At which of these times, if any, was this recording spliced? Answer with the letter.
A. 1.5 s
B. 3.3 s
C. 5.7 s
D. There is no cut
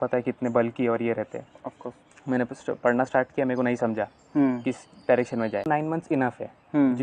C